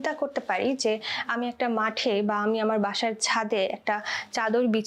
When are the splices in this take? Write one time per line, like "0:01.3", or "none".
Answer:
none